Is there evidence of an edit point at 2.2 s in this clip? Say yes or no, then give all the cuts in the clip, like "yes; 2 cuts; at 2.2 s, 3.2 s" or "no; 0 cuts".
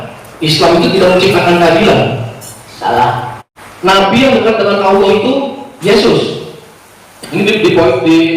no; 1 cut; at 3.4 s